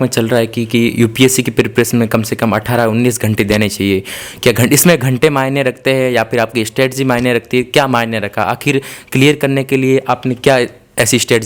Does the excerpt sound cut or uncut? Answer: uncut